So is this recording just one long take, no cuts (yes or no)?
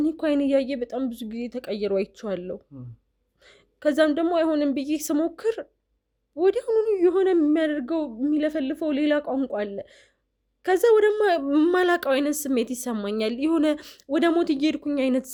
yes